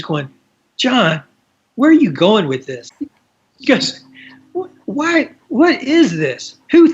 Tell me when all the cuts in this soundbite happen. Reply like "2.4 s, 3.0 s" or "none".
none

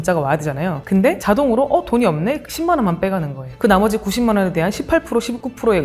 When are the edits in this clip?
1.0 s, 3.5 s

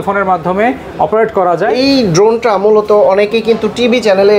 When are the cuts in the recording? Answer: 1.7 s

